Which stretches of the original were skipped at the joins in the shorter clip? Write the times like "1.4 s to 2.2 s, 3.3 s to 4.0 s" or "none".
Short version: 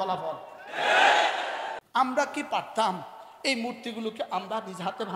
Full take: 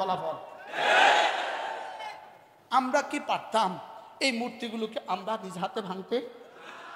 1.8 s to 2.6 s